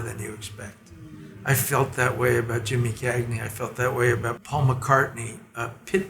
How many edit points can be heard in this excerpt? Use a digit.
1